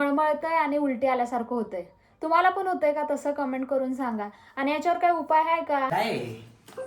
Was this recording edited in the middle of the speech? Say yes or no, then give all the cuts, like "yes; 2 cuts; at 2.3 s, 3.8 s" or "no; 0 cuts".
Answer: yes; 1 cut; at 5.9 s